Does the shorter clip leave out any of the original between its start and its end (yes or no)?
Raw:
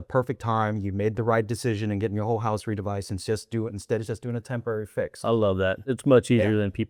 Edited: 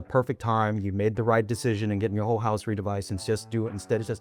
no